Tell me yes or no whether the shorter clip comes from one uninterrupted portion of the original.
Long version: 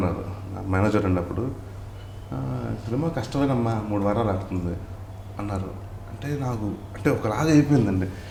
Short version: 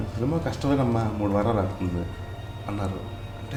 yes